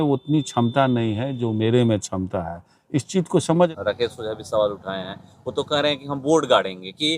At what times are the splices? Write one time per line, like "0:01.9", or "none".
0:03.7